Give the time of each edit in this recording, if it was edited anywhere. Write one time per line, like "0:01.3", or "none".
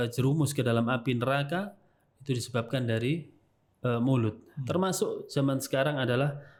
none